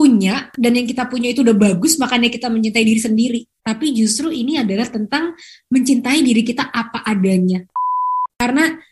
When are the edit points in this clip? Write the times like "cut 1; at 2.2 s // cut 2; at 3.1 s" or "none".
cut 1; at 8.0 s